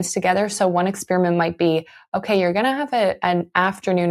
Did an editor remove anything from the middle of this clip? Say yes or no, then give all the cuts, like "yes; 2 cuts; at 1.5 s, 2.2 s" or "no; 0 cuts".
no; 0 cuts